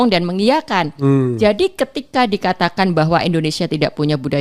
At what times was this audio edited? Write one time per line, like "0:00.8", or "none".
none